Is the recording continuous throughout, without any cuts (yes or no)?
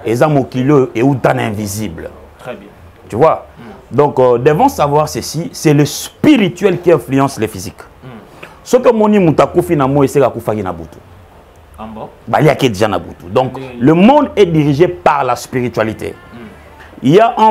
yes